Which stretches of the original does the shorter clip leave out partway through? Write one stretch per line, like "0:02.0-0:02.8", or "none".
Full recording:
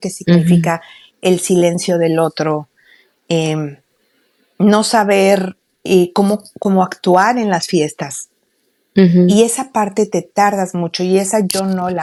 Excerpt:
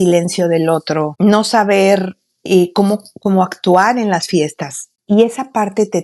0:02.6-0:04.5
0:08.5-0:09.3